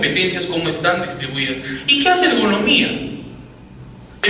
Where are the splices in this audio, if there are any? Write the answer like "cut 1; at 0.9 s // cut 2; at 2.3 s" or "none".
none